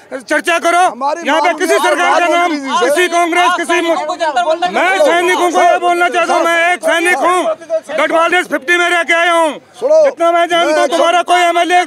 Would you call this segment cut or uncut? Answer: uncut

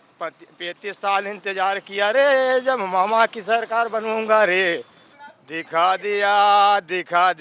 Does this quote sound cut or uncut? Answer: cut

